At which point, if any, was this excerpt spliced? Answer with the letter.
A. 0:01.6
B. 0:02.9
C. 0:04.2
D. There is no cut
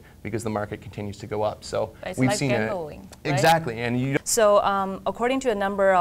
C